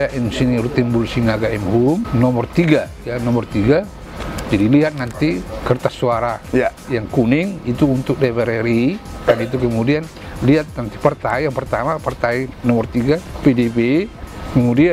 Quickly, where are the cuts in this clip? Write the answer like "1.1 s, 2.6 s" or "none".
2.1 s